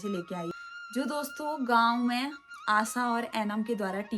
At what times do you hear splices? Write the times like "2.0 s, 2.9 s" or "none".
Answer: 1.0 s